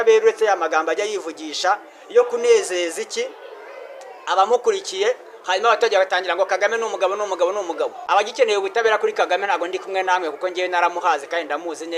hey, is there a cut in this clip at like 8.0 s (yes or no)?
yes